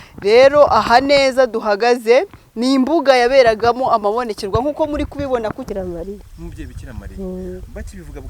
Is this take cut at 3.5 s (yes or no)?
no